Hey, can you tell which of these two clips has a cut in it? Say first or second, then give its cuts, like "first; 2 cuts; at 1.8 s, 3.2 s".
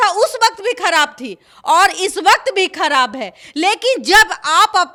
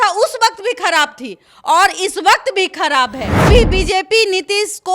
second; 1 cut; at 3.5 s